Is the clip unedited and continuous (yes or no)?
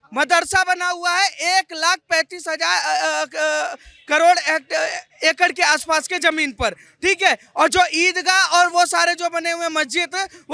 yes